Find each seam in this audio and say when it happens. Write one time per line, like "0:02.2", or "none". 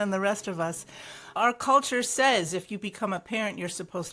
0:01.4